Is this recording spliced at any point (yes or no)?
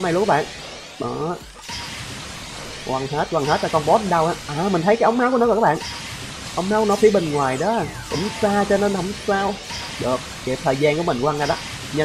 no